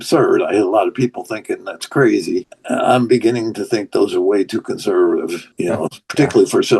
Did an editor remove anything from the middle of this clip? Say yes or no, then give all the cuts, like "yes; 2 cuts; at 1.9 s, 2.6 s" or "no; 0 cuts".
yes; 2 cuts; at 2.5 s, 5.4 s